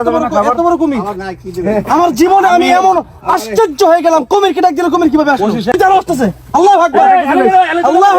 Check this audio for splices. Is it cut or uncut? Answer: cut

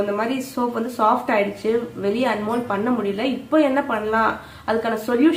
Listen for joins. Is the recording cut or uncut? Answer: uncut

